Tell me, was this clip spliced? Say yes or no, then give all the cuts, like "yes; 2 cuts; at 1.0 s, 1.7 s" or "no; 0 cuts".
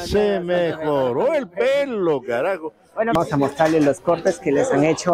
yes; 1 cut; at 3.2 s